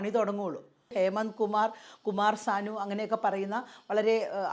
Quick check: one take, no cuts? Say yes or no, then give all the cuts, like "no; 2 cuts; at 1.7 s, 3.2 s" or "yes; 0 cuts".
no; 1 cut; at 0.9 s